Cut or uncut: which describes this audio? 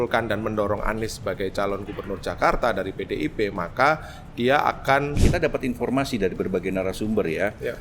cut